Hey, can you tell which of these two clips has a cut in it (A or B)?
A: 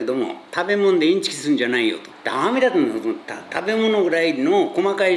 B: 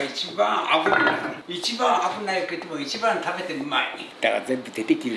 A